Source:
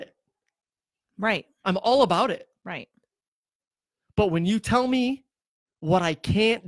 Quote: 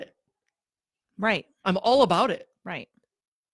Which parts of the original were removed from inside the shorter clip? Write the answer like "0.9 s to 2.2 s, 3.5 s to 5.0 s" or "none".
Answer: none